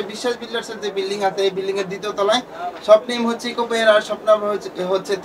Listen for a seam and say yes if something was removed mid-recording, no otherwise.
no